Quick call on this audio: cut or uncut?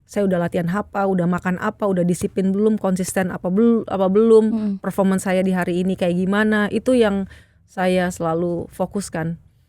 uncut